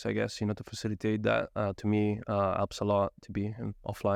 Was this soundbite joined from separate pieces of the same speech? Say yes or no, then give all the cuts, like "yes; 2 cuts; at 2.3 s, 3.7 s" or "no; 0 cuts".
no; 0 cuts